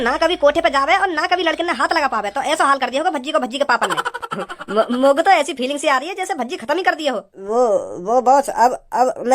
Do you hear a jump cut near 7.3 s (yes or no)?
yes